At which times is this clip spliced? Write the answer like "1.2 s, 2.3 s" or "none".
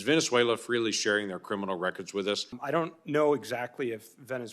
2.6 s